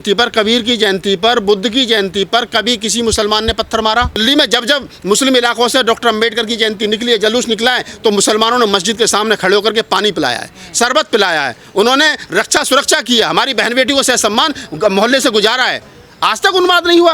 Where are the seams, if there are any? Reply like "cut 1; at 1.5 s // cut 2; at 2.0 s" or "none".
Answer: cut 1; at 4.2 s